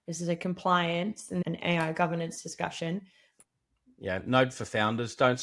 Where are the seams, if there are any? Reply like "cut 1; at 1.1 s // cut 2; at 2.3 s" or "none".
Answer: cut 1; at 1.4 s // cut 2; at 3.4 s